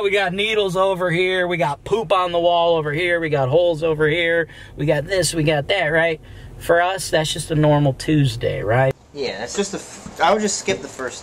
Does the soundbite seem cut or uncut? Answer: cut